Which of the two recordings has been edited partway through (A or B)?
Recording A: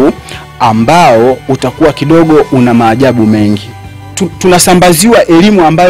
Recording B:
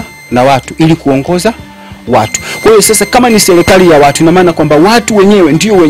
A